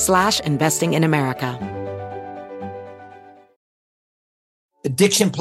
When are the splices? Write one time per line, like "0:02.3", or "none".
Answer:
0:01.5